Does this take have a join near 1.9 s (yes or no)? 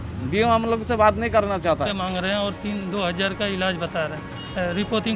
yes